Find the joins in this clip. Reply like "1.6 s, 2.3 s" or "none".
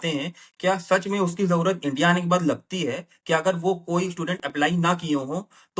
none